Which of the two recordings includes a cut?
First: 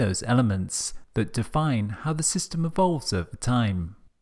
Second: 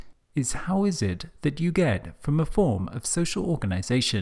first; 1 cut; at 2.9 s

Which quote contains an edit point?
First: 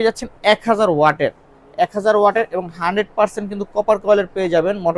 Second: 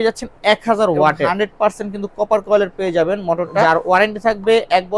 second; 2 cuts; at 1.3 s, 3.6 s

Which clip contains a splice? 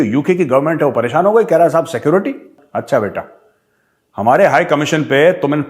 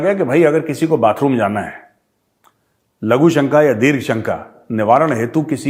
first; 1 cut; at 2.6 s

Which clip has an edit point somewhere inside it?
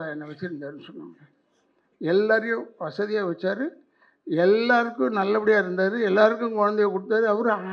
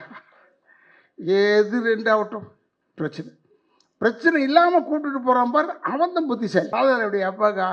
second; 1 cut; at 6.7 s

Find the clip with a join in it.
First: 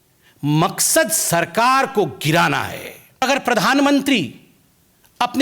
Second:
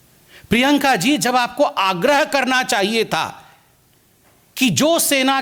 first; 1 cut; at 3.2 s

